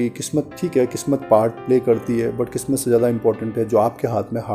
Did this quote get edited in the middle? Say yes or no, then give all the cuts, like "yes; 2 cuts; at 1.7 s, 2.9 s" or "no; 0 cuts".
no; 0 cuts